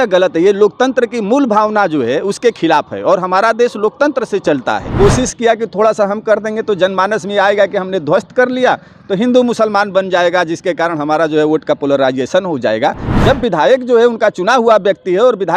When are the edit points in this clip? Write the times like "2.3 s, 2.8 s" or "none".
4.9 s, 13.0 s

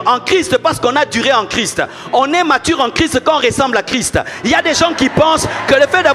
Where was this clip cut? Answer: none

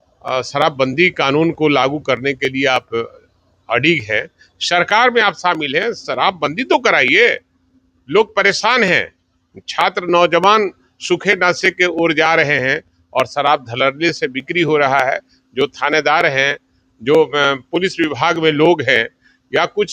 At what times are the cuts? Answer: none

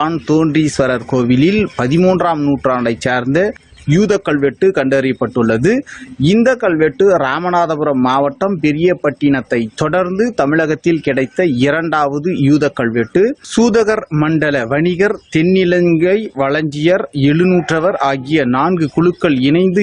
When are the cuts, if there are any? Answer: none

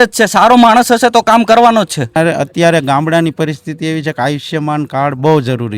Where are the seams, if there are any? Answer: 2.2 s

